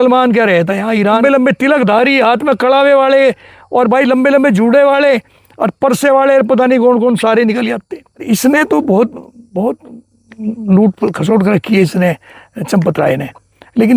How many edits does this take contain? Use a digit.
2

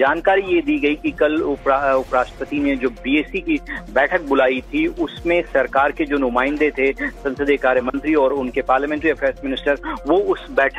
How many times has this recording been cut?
1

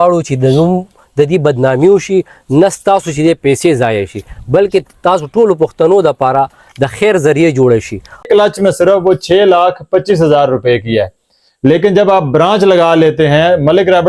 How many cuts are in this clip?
1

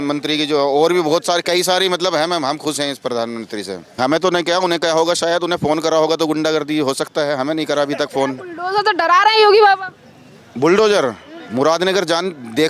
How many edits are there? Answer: 1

